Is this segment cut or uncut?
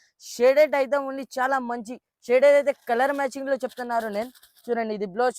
uncut